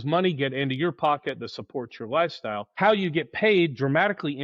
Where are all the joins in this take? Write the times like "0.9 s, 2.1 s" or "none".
2.7 s